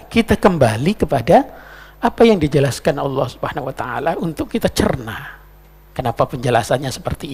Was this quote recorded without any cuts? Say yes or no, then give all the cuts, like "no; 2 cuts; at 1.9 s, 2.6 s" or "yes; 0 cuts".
yes; 0 cuts